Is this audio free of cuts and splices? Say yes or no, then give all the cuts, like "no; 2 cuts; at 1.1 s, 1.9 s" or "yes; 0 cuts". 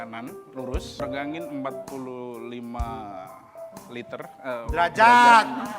no; 1 cut; at 1.0 s